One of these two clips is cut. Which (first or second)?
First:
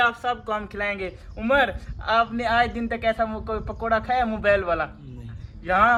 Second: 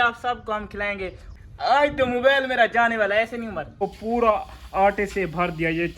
second